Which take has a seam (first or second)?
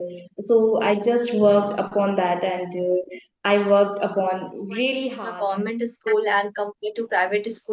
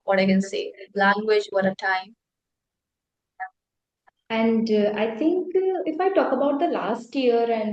first